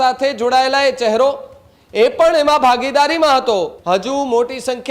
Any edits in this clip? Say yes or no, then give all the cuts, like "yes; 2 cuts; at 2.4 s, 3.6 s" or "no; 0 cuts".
yes; 1 cut; at 3.8 s